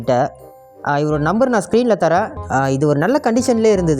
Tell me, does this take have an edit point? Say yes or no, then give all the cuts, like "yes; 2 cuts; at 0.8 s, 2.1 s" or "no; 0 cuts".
yes; 1 cut; at 2.4 s